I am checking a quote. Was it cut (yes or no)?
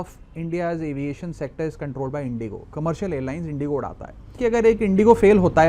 yes